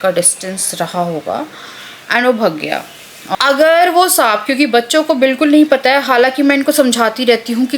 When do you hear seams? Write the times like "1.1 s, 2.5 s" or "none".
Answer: 3.3 s